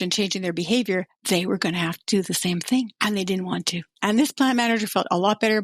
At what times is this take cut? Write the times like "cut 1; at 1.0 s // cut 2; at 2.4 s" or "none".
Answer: cut 1; at 1.1 s // cut 2; at 2.9 s // cut 3; at 3.9 s